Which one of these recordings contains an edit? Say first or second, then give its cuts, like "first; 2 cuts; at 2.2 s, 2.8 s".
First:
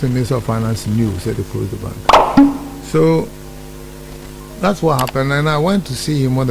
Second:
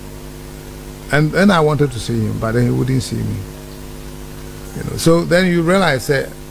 first; 2 cuts; at 2.0 s, 2.6 s